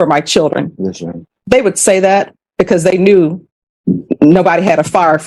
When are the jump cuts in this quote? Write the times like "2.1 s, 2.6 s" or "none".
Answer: none